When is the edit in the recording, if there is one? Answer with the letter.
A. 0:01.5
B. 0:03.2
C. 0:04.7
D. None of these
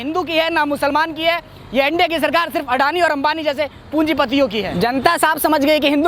C